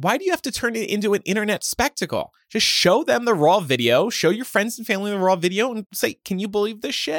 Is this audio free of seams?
no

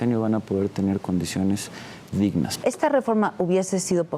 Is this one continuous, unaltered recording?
no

